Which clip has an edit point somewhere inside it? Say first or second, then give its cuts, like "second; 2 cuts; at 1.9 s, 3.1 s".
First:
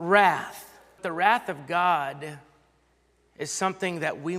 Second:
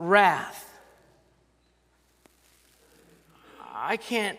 first; 1 cut; at 1.0 s